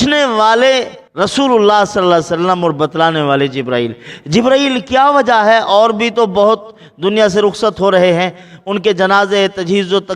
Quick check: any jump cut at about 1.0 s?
yes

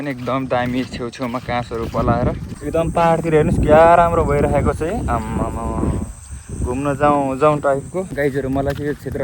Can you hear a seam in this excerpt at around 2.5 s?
yes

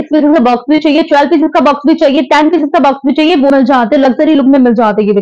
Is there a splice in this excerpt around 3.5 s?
yes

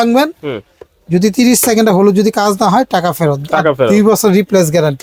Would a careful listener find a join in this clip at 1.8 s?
no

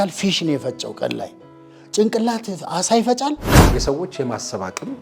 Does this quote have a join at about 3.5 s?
yes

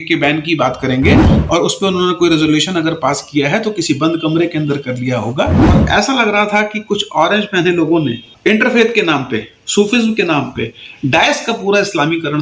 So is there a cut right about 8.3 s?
yes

